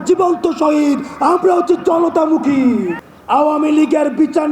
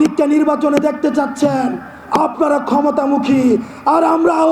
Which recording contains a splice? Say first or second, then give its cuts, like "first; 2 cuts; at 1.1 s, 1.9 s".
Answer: first; 1 cut; at 3.0 s